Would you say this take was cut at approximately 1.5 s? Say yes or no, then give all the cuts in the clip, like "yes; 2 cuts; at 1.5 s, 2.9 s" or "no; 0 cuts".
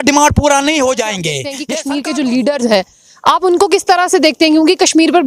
yes; 1 cut; at 1.5 s